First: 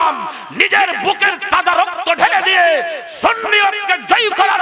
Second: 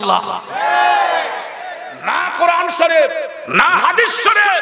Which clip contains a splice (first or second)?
second